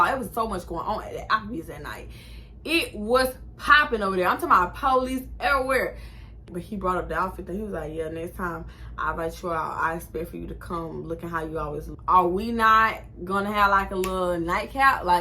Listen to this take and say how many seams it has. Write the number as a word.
two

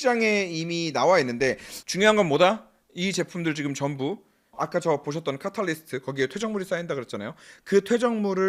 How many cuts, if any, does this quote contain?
zero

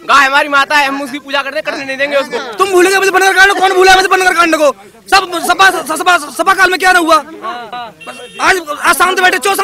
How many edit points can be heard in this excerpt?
two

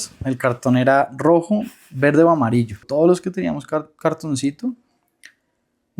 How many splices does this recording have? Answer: one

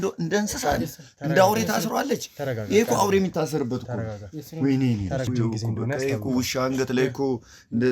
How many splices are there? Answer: one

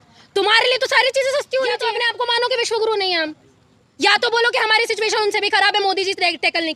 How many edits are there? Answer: zero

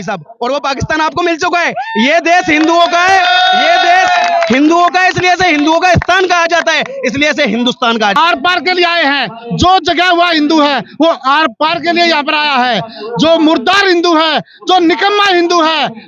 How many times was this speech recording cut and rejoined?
one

